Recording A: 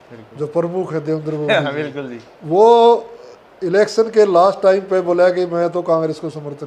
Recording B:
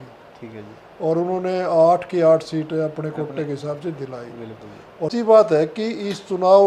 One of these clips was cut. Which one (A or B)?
B